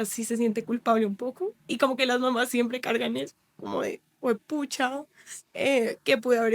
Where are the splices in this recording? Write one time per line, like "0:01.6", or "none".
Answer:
0:01.6